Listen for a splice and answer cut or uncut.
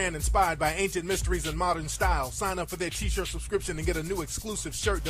cut